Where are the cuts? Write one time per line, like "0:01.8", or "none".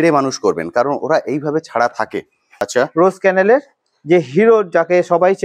0:02.5